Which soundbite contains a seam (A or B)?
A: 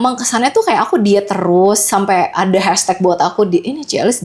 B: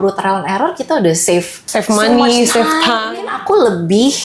B